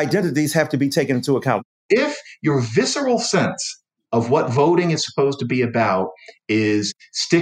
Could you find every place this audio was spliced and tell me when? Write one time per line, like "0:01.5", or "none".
0:01.6